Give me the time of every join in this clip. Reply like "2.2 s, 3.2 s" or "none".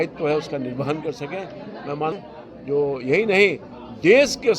2.1 s